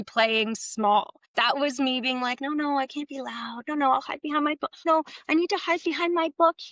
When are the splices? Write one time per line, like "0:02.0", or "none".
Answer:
0:01.2
0:04.8